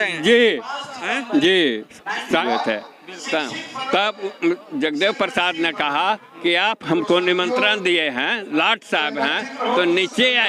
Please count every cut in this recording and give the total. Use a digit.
1